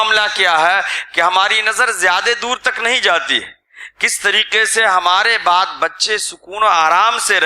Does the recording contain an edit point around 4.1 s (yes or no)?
no